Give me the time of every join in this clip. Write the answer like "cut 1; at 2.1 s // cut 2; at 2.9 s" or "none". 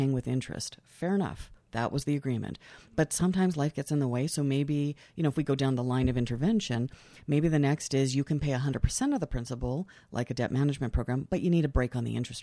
none